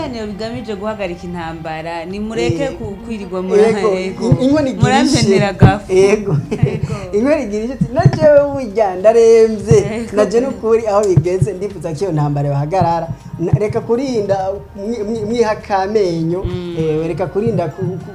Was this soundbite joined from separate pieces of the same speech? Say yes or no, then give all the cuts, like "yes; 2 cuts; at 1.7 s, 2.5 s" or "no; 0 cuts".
no; 0 cuts